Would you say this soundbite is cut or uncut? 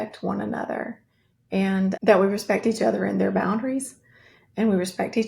cut